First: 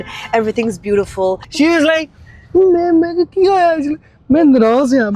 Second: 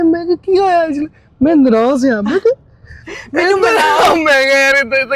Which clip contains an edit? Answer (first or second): first